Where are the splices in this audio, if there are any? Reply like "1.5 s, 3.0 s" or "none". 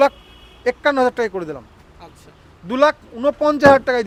none